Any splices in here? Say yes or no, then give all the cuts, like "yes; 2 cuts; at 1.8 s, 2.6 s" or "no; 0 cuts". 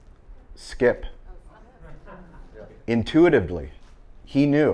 yes; 1 cut; at 2.8 s